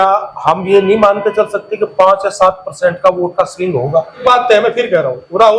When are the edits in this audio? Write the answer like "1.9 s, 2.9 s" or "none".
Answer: 4.2 s